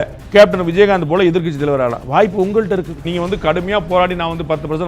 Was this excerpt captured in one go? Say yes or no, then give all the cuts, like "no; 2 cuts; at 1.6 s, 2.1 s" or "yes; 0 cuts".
no; 1 cut; at 3.0 s